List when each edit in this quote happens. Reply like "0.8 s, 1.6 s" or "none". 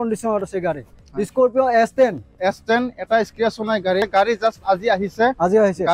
4.0 s